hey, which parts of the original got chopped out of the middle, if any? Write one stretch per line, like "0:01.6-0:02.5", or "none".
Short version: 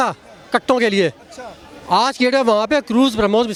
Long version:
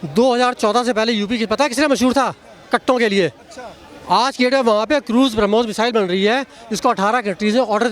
none